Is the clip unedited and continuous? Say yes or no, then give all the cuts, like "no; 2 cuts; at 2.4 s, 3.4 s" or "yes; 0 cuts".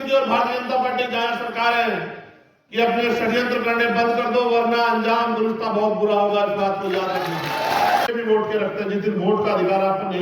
no; 1 cut; at 8.1 s